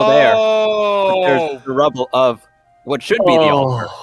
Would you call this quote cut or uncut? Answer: uncut